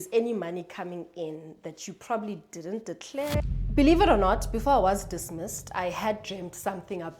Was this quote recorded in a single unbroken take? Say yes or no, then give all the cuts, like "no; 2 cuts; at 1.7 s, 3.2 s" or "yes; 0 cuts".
no; 1 cut; at 3.4 s